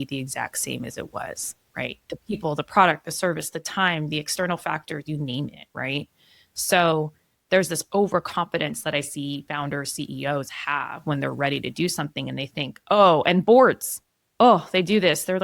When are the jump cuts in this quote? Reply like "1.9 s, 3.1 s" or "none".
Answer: none